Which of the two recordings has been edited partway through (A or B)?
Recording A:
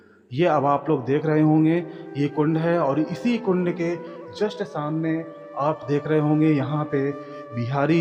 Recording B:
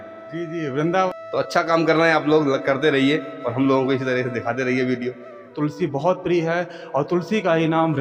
B